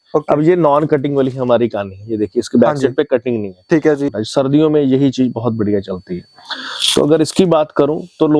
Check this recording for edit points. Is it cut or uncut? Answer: cut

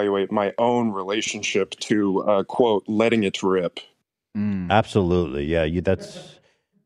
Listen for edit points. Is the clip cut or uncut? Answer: uncut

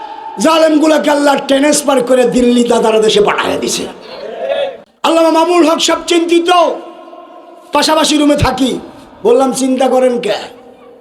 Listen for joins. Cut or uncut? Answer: cut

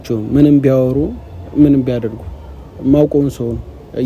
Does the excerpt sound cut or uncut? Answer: uncut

